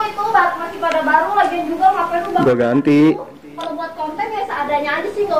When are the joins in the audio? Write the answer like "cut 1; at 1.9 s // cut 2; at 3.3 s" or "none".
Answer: none